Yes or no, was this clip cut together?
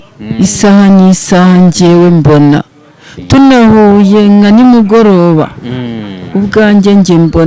no